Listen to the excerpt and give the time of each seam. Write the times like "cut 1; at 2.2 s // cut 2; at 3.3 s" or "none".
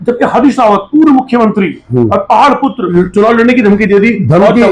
cut 1; at 2.8 s